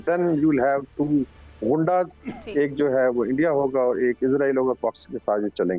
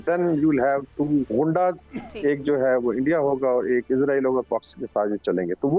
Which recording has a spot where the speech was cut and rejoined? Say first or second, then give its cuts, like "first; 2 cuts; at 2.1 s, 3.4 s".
second; 1 cut; at 1.3 s